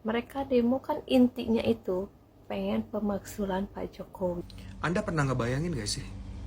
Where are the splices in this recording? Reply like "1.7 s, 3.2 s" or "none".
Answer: 4.6 s